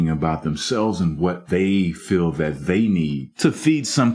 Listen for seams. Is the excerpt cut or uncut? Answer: cut